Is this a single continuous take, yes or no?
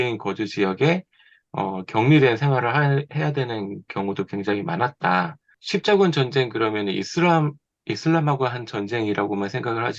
no